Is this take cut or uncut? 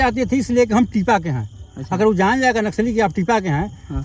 uncut